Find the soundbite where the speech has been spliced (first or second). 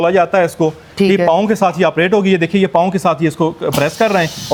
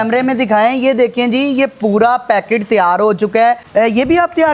second